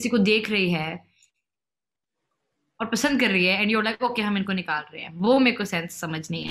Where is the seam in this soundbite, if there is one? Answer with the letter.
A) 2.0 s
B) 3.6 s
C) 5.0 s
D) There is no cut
D